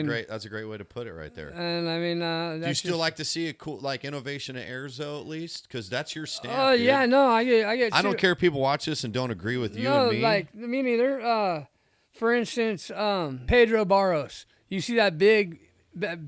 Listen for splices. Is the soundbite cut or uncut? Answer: cut